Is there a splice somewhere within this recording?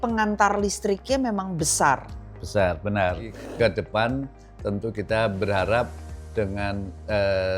yes; 2 cuts; at 3.4 s, 6.0 s

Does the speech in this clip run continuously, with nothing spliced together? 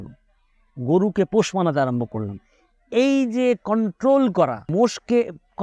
no; 1 cut; at 4.7 s

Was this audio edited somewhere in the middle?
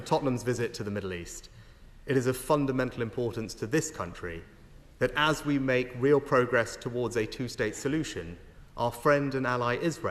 no; 0 cuts

